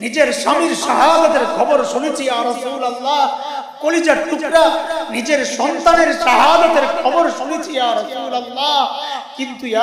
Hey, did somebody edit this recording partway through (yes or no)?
no